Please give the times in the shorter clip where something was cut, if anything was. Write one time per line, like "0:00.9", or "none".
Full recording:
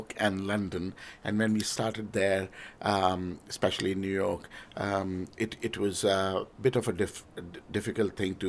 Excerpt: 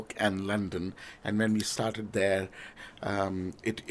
0:02.7

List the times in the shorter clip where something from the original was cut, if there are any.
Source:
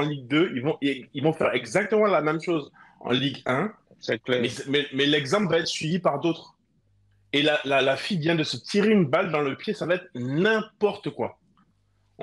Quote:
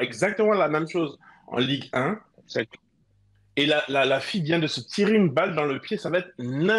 0:02.7

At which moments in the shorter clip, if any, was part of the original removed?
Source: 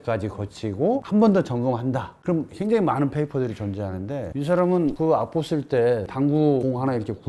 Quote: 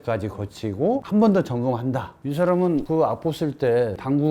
0:02.1

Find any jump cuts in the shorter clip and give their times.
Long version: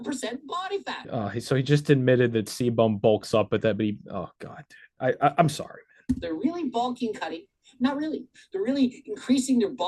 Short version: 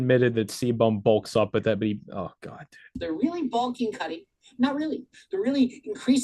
0:03.0

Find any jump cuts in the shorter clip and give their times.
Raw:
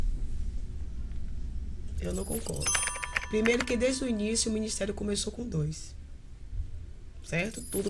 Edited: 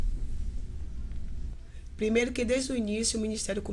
0:01.8

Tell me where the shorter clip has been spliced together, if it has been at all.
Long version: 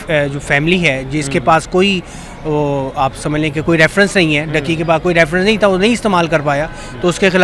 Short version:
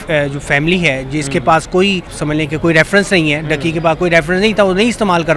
0:02.2

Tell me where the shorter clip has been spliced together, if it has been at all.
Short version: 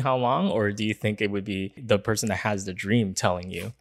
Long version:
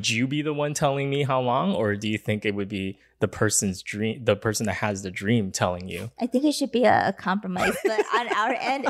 0:01.8

